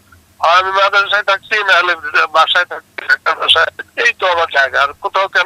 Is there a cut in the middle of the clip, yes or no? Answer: yes